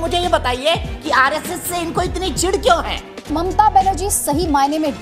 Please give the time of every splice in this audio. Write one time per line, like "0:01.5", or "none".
0:03.3

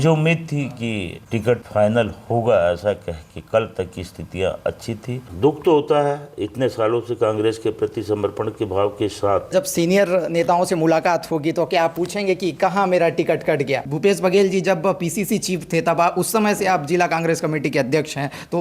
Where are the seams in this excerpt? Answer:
0:05.2
0:09.5
0:13.9

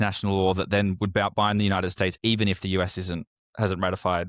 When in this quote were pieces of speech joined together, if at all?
0:03.4

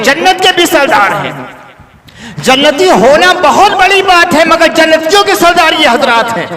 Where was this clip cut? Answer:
none

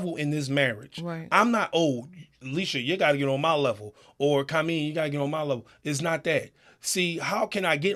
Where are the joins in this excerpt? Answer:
none

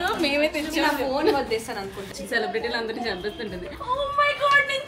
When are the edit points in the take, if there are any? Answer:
0:02.1
0:03.7

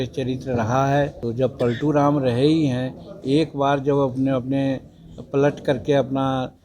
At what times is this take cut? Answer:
0:01.2

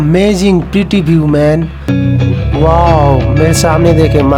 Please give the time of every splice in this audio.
0:01.9

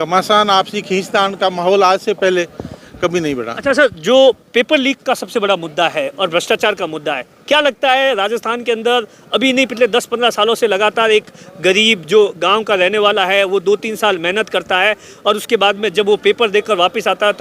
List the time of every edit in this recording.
none

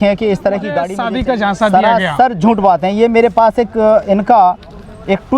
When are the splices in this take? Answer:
0:01.0

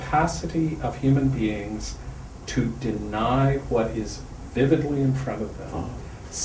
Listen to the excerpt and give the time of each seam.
none

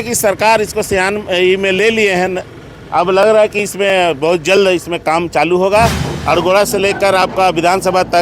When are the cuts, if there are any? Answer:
0:06.1

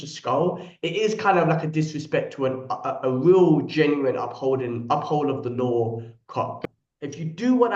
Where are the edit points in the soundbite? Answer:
0:06.6

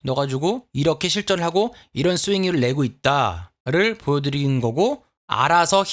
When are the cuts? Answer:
none

